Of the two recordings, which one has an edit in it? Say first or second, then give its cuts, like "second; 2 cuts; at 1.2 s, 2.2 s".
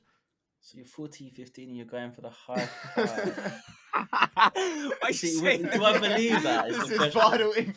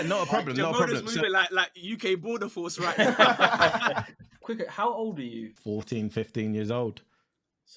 second; 2 cuts; at 4.3 s, 5.5 s